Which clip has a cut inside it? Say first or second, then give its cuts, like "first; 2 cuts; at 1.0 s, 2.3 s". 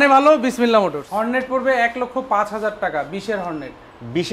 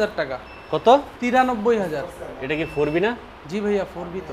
first; 1 cut; at 1.0 s